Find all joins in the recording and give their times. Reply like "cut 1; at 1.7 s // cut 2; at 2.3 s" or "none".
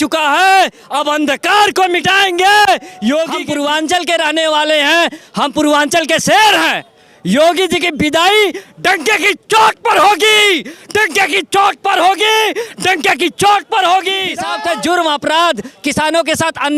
cut 1; at 3.4 s // cut 2; at 14.4 s